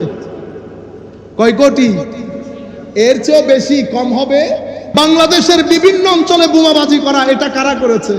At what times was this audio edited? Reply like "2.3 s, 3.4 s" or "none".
4.8 s

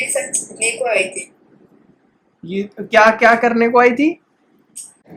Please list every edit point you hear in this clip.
none

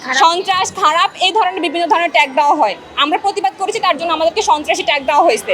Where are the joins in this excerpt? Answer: none

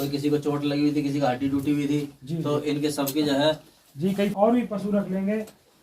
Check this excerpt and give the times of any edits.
4.3 s

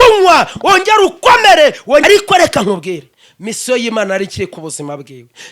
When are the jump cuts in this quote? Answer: 2.0 s

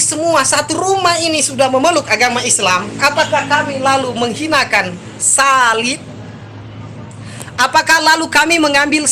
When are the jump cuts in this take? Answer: none

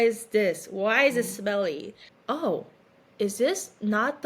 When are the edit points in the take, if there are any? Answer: 2.2 s

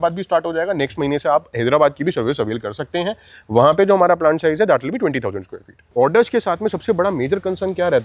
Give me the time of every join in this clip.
5.8 s

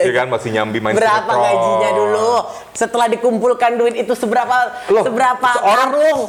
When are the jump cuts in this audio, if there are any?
none

